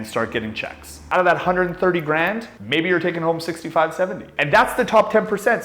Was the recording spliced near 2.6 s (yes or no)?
no